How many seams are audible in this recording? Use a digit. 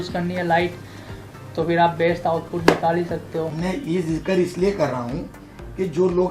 1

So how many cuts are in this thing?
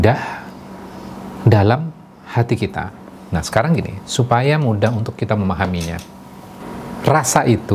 1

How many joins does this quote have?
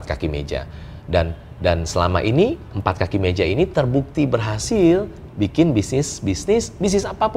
0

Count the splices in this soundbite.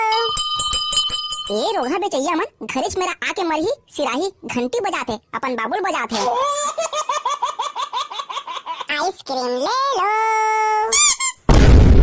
2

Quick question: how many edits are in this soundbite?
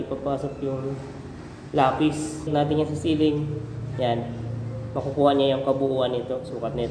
1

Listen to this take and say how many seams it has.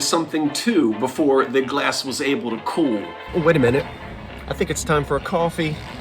1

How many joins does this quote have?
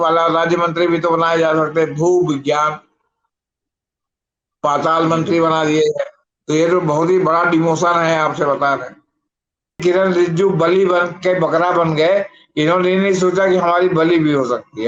1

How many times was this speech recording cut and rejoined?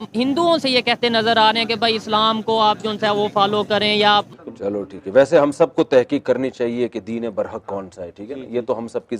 1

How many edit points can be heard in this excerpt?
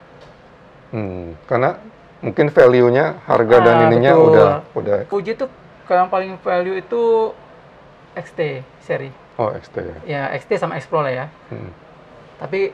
1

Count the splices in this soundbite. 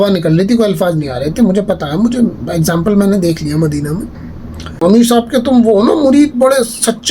1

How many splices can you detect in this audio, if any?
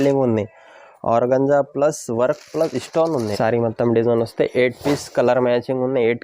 1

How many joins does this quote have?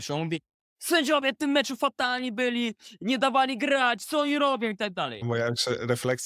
1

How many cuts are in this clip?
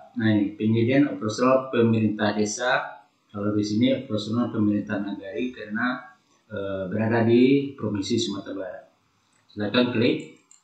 0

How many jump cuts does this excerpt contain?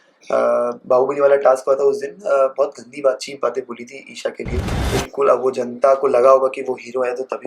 1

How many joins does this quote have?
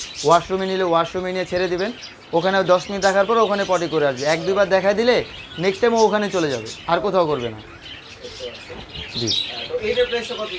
0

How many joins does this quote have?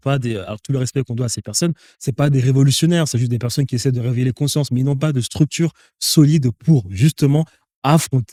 0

